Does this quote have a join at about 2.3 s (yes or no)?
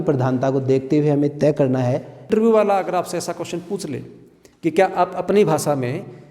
yes